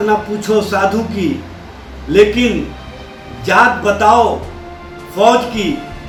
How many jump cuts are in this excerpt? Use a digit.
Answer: 0